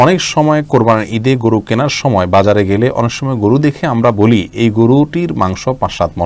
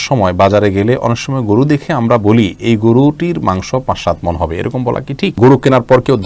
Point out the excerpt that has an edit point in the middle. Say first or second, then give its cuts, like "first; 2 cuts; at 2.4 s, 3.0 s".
second; 1 cut; at 5.3 s